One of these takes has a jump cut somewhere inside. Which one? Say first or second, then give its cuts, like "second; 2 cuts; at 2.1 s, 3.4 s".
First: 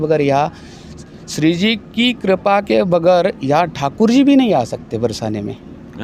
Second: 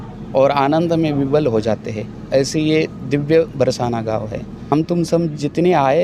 second; 1 cut; at 4.7 s